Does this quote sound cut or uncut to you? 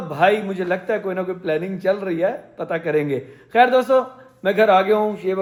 uncut